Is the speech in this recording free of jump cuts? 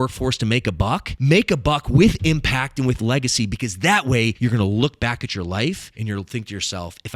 no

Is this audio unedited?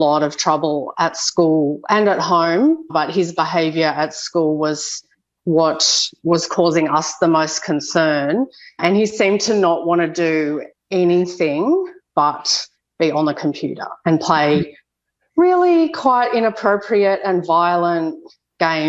yes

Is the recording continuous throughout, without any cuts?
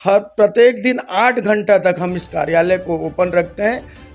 yes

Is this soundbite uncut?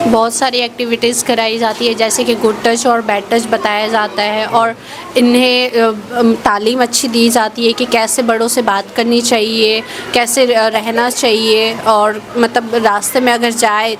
yes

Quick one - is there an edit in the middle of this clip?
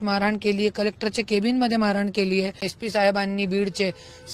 yes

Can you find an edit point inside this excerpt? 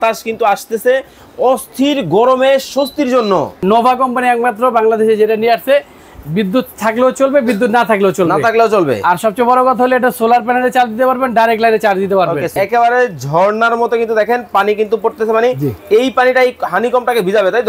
yes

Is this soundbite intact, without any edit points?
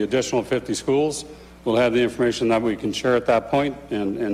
yes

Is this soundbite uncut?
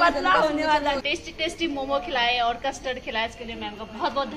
no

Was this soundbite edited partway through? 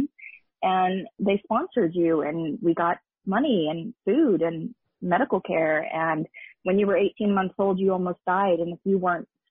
yes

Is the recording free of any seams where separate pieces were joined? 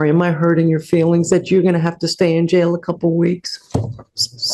yes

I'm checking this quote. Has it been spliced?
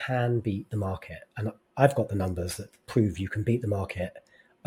no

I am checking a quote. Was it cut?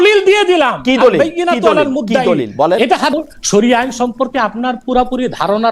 yes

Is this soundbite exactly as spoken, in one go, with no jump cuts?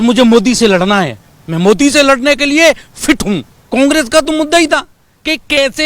no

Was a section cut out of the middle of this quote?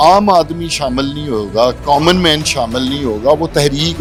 no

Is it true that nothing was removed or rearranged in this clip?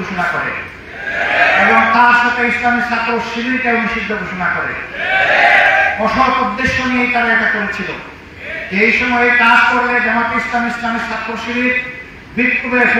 yes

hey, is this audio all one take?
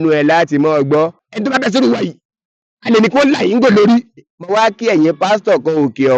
no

